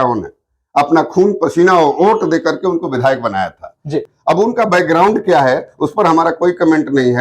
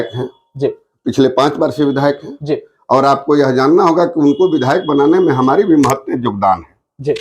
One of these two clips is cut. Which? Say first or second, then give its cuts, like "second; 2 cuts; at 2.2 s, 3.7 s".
first; 1 cut; at 4.0 s